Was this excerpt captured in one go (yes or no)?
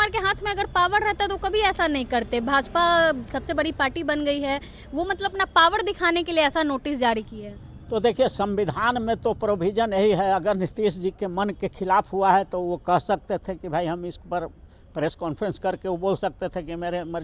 yes